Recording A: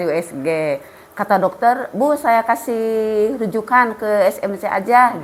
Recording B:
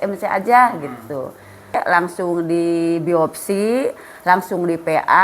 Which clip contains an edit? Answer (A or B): B